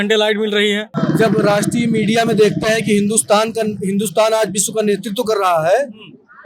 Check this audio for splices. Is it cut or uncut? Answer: cut